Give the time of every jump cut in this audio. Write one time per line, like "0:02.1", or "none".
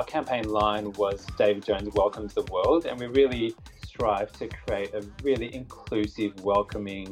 none